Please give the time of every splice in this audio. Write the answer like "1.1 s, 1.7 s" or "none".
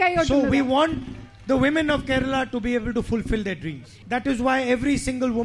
3.9 s